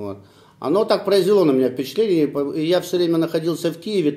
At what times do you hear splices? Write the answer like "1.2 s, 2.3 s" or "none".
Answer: 1.4 s